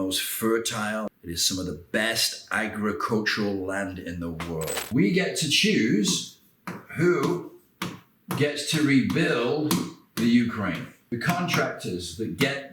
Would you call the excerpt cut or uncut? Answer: cut